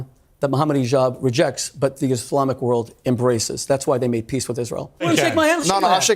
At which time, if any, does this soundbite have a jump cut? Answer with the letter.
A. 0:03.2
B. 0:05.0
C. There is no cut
B